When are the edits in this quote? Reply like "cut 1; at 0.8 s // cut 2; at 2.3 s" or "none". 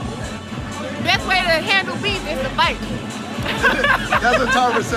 none

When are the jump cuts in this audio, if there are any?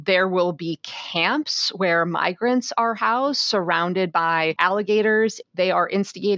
cut 1; at 4.6 s // cut 2; at 5.4 s

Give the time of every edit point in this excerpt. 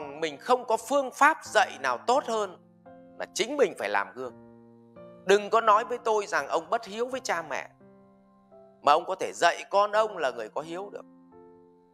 cut 1; at 11.0 s

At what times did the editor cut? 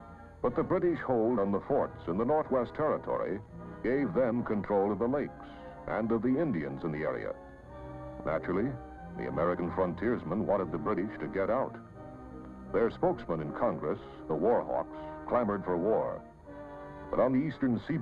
cut 1; at 15.0 s

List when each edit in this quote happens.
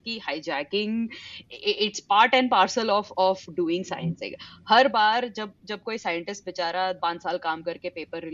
cut 1; at 1.3 s // cut 2; at 7.0 s

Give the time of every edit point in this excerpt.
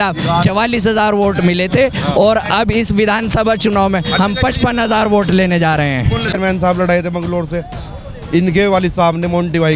cut 1; at 6.3 s

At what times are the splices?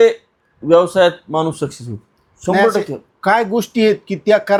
none

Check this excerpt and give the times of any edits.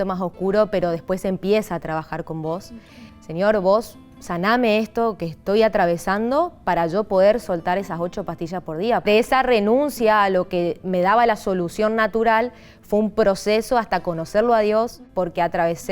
cut 1; at 2.6 s // cut 2; at 9.0 s // cut 3; at 14.9 s

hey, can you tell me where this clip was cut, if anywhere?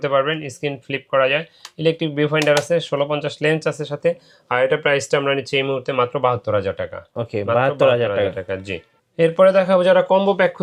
none

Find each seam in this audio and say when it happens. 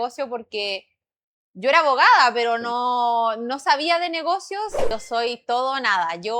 cut 1; at 4.9 s

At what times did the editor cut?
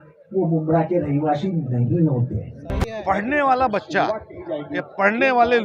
cut 1; at 3.0 s

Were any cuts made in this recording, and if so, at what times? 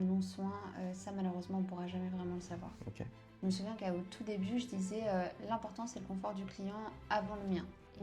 cut 1; at 2.9 s

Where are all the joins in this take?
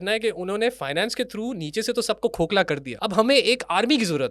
cut 1; at 2.9 s

